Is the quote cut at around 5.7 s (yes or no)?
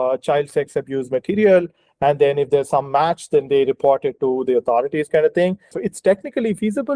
yes